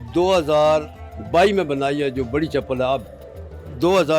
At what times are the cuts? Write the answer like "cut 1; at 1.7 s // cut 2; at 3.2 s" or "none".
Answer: none